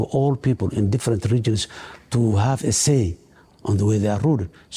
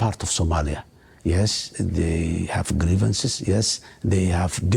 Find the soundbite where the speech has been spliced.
first; 1 cut; at 3.5 s

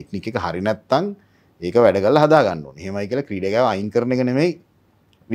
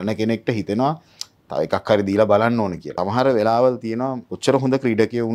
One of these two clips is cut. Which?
second; 2 cuts; at 2.9 s, 4.3 s

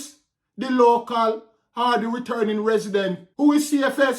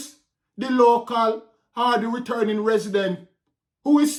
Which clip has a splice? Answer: first; 1 cut; at 3.2 s

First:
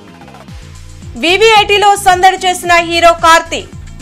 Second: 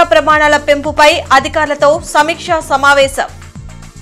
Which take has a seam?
first; 1 cut; at 1.0 s

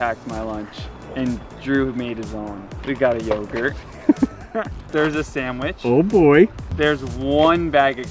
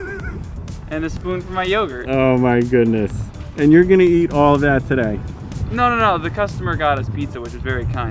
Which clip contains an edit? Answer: first; 3 cuts; at 2.7 s, 4.8 s, 6.6 s

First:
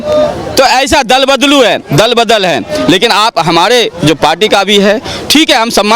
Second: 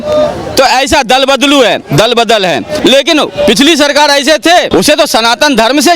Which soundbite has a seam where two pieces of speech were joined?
second; 2 cuts; at 2.7 s, 4.7 s

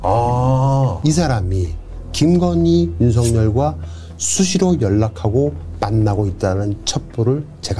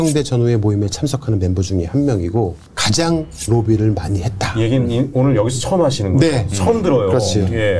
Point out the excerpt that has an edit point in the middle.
first; 1 cut; at 1.0 s

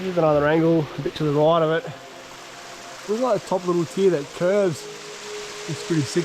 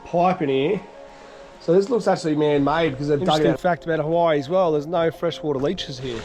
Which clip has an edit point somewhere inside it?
second; 1 cut; at 3.5 s

